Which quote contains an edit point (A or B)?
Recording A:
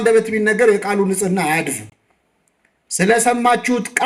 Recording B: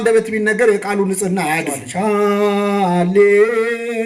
B